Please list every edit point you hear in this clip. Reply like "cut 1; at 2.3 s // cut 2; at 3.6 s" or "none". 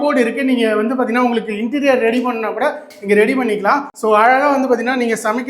none

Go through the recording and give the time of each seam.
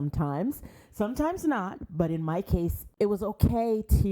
cut 1; at 2.8 s

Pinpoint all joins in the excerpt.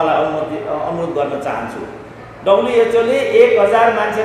none

